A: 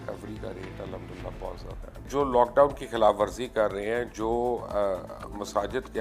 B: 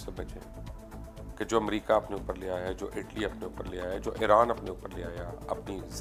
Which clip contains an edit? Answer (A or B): A